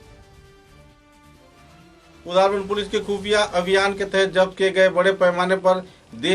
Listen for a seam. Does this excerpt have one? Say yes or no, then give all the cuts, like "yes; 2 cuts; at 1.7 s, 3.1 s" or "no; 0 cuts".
yes; 1 cut; at 2.2 s